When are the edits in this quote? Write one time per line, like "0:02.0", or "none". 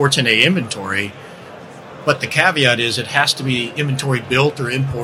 none